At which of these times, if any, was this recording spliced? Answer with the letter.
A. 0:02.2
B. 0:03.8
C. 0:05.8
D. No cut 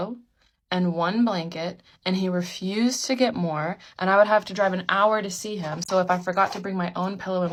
D